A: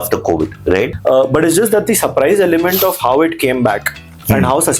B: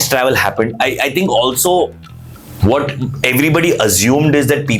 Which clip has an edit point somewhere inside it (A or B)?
A